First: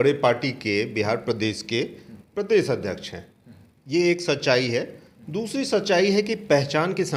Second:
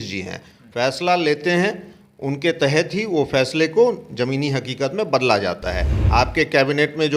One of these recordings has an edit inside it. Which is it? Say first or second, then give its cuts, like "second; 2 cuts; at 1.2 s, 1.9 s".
second; 1 cut; at 5.9 s